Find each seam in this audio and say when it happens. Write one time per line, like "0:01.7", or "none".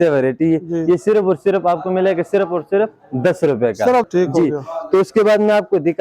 0:04.1